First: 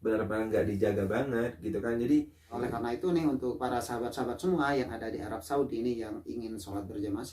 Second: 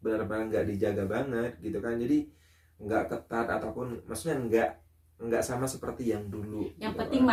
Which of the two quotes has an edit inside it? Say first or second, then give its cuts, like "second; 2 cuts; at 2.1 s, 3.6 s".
first; 1 cut; at 2.6 s